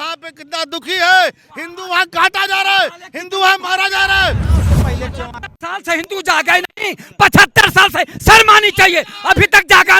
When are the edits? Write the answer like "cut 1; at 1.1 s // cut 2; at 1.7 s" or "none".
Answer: cut 1; at 4.7 s